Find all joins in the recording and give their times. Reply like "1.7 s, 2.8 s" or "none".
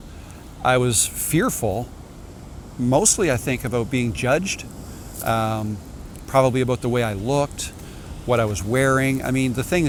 none